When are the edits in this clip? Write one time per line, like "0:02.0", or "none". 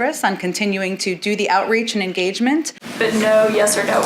0:02.8